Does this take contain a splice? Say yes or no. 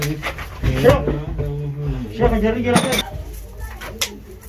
yes